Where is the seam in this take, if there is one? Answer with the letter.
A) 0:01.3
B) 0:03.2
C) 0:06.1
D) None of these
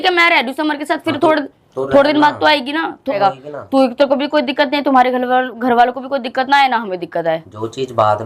B